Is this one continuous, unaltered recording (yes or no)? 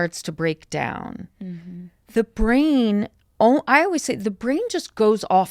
yes